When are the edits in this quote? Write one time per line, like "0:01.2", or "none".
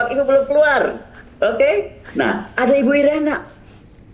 none